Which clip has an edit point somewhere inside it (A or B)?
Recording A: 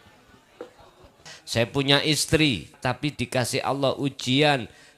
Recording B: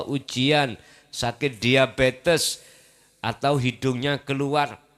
A